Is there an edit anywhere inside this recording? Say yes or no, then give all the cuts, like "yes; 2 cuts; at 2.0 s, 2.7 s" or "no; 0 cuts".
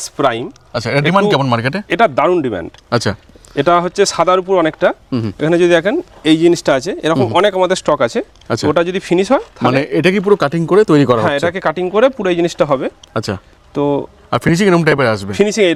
no; 0 cuts